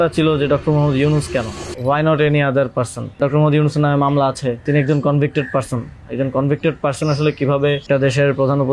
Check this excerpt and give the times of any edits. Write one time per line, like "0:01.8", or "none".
0:01.6
0:03.2
0:04.6
0:07.8